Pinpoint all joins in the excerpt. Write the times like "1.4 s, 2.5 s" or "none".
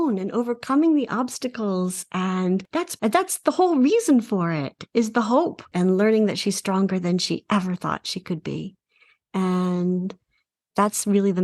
2.9 s, 4.8 s, 5.7 s